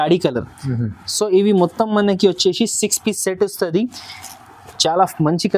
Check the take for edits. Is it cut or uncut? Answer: uncut